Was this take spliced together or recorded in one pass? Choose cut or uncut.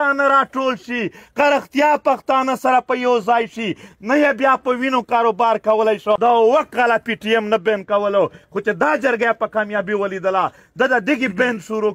cut